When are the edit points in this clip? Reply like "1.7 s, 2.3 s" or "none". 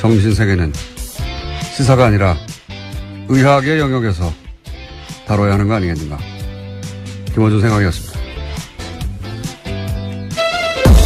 none